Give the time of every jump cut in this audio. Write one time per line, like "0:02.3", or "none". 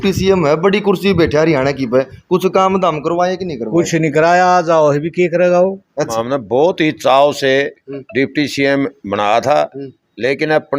0:05.9